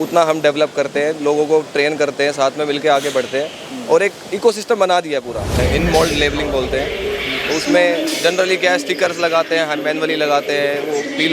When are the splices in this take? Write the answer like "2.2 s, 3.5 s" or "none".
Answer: 5.6 s